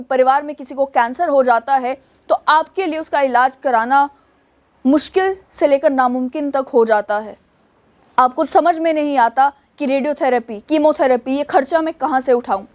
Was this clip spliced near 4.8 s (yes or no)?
no